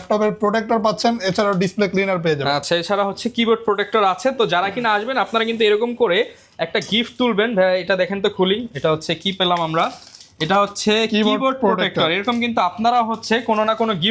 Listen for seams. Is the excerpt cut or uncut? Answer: uncut